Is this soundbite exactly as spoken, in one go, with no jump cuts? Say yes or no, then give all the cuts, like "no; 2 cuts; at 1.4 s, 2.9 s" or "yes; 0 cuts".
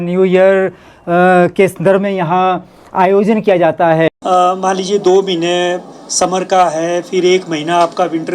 no; 1 cut; at 4.1 s